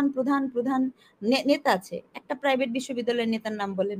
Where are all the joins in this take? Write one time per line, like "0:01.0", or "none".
none

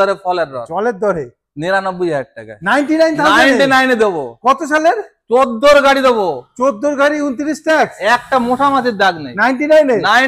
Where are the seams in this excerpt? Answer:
none

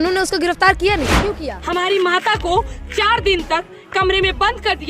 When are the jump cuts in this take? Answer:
0:01.5

